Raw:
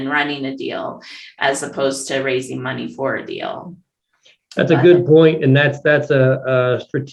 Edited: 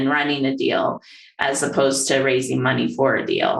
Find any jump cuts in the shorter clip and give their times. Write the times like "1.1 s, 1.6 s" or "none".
none